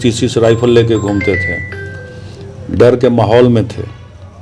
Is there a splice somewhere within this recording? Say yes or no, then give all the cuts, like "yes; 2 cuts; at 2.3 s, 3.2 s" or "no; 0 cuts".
no; 0 cuts